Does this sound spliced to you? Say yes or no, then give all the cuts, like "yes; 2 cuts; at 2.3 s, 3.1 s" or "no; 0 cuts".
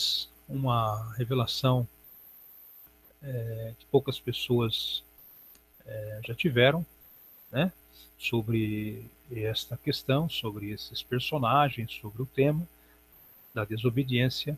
yes; 1 cut; at 6.5 s